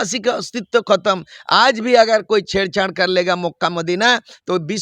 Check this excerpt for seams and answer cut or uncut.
uncut